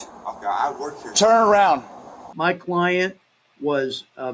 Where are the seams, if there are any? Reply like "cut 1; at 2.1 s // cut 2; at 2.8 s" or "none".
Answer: none

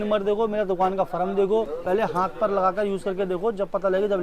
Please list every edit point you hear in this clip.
cut 1; at 1.7 s

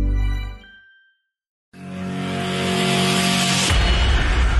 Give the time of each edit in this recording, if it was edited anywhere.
cut 1; at 1.6 s

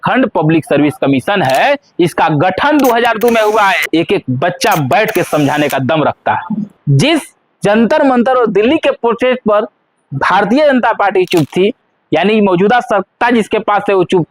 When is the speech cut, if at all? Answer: cut 1; at 3.8 s // cut 2; at 6.7 s

